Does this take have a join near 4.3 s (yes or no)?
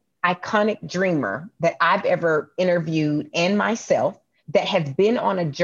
yes